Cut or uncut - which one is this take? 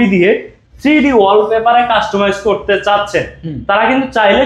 uncut